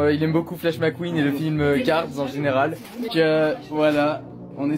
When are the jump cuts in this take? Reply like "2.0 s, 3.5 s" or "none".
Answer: none